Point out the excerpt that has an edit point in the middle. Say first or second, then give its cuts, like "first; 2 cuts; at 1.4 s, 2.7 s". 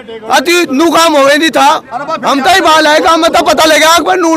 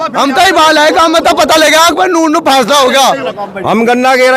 second; 1 cut; at 3.3 s